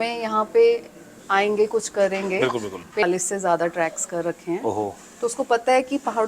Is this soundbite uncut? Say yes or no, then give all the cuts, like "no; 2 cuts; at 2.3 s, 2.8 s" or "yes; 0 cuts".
no; 1 cut; at 3.0 s